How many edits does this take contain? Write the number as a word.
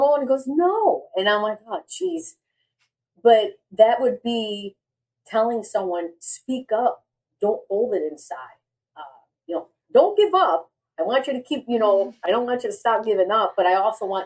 zero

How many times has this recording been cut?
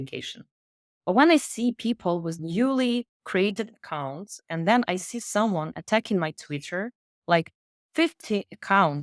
zero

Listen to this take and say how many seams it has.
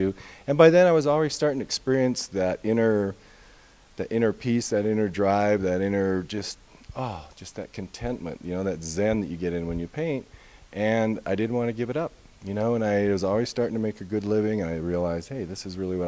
one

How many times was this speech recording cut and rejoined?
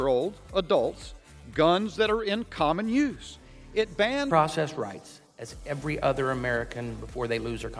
one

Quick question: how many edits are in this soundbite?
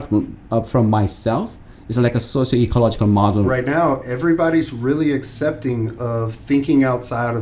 one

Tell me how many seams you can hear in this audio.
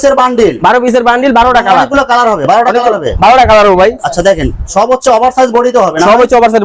zero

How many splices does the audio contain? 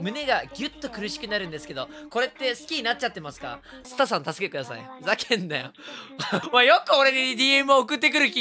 two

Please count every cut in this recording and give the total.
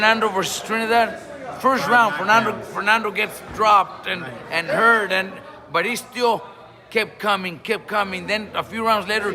zero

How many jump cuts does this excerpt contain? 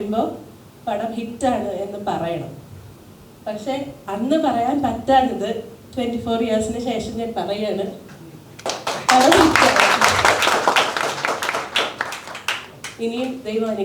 zero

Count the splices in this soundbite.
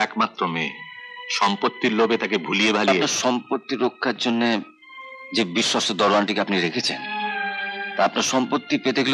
one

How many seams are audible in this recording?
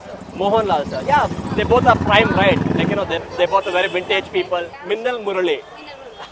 one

